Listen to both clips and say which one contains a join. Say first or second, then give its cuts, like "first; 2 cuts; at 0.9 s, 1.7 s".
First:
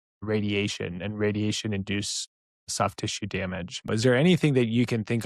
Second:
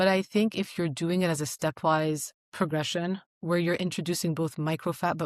first; 1 cut; at 3.9 s